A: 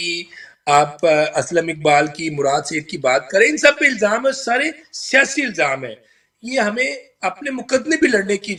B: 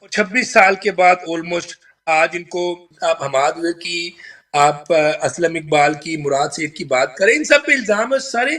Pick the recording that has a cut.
B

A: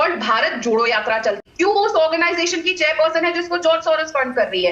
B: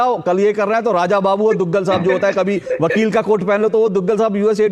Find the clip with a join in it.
A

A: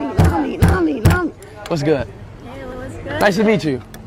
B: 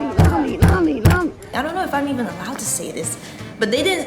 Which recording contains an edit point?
B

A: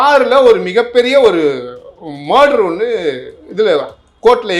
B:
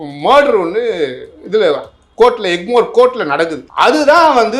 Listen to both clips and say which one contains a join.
B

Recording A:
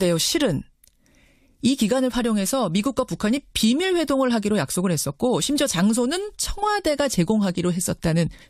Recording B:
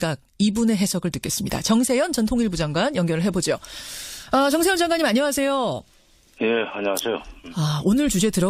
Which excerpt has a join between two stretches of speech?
A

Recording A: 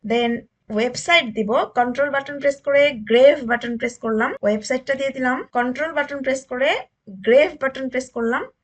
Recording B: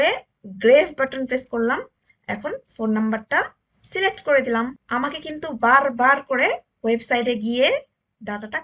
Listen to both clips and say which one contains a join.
A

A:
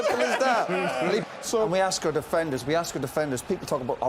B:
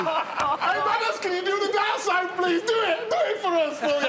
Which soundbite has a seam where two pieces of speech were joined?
A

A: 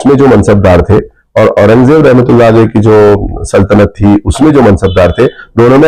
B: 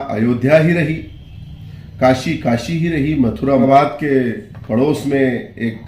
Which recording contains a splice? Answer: B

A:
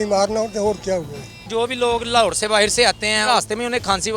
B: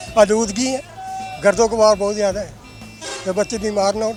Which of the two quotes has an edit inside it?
A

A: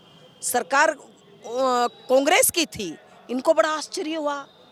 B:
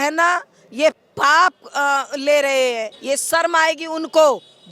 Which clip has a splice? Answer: B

